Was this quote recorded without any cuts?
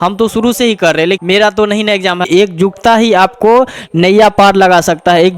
no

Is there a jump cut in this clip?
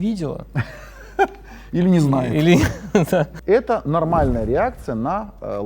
no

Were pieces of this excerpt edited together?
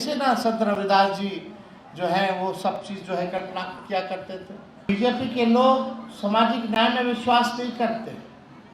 yes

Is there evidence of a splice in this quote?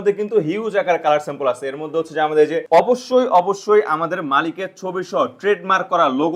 yes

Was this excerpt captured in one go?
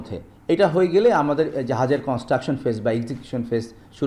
yes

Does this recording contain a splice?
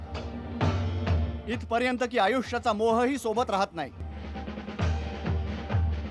yes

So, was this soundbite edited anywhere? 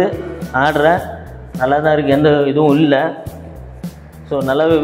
no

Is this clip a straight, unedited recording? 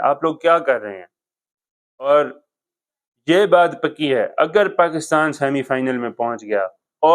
no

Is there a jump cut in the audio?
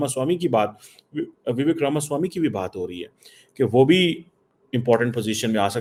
no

